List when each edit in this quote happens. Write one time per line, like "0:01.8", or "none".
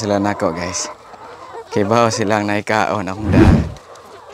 none